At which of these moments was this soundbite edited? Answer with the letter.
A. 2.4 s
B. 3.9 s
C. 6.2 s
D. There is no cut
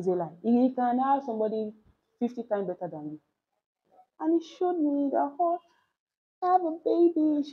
B